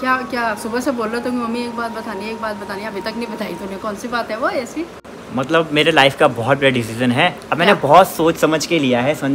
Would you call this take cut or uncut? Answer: uncut